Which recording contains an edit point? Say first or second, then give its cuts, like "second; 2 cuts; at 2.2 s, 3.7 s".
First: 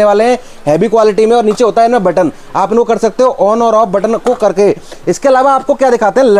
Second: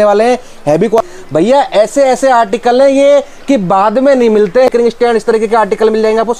second; 2 cuts; at 1.0 s, 4.7 s